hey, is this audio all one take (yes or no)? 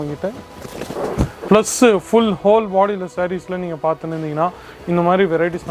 no